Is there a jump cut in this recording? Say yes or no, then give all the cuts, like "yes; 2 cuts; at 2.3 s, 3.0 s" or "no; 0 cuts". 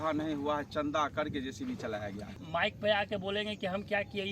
yes; 1 cut; at 2.4 s